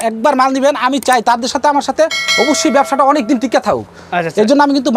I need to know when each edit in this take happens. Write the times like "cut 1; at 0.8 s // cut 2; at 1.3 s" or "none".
none

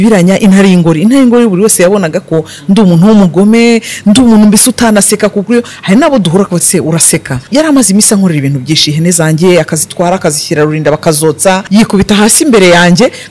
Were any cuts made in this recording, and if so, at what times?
cut 1; at 7.5 s // cut 2; at 11.6 s

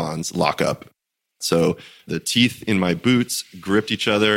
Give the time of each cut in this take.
cut 1; at 1.3 s // cut 2; at 2.1 s

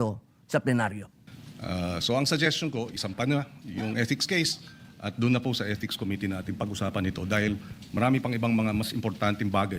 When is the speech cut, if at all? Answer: cut 1; at 1.1 s

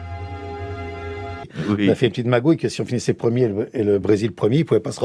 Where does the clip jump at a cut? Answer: cut 1; at 1.5 s

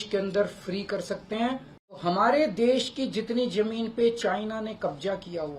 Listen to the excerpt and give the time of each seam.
cut 1; at 2.0 s

